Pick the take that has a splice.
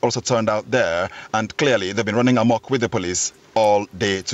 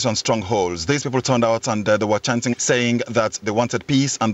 second; 2 cuts; at 2.5 s, 3.4 s

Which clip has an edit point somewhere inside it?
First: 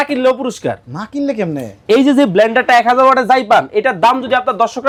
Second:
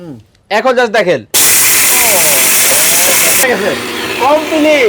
second; 1 cut; at 3.4 s

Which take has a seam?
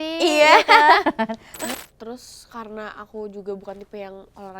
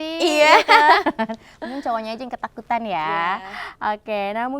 first; 1 cut; at 1.7 s

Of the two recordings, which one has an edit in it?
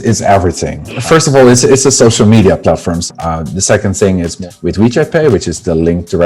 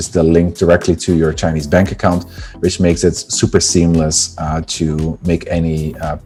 first; 1 cut; at 3.0 s

